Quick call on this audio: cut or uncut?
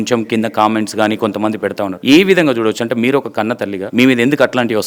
cut